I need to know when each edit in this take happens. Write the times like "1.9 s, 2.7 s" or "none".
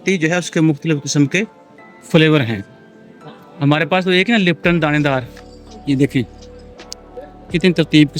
5.7 s